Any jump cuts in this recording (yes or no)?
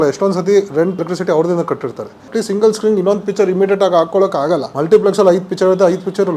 yes